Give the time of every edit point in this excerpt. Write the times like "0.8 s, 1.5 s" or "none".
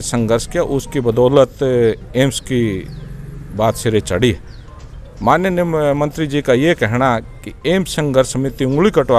none